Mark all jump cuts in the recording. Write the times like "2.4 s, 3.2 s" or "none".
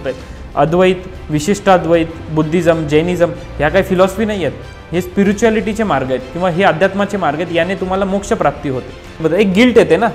9.2 s